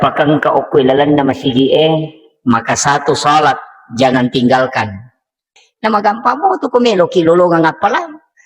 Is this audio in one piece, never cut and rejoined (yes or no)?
no